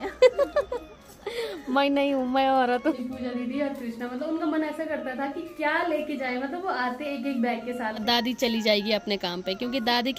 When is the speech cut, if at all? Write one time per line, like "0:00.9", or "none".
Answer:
0:02.9
0:08.0